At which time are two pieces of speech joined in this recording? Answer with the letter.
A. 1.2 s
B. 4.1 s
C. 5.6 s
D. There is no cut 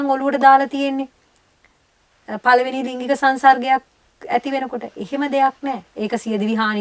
D